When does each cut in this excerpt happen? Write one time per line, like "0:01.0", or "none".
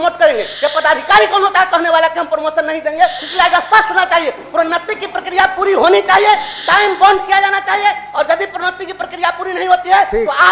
0:03.2